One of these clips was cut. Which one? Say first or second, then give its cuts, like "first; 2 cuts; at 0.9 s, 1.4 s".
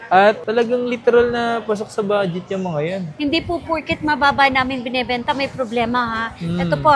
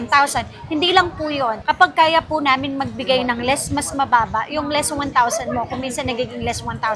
first; 1 cut; at 3.1 s